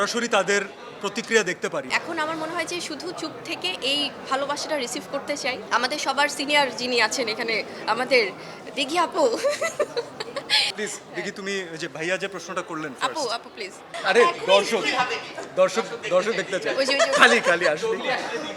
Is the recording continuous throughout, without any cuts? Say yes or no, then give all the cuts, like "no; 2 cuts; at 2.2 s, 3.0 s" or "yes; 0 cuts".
no; 4 cuts; at 1.9 s, 5.6 s, 10.7 s, 13.8 s